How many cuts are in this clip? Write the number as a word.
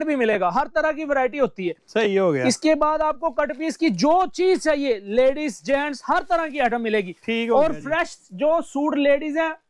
zero